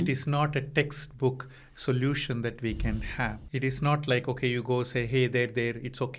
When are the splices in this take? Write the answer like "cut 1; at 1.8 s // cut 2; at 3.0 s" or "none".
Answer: cut 1; at 3.4 s